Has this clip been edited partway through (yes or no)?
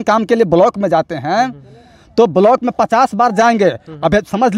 no